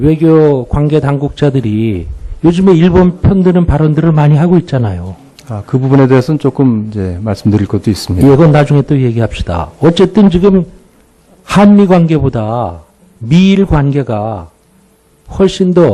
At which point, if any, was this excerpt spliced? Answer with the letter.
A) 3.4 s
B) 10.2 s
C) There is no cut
B